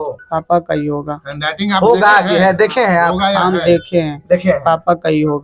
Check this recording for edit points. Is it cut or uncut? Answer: uncut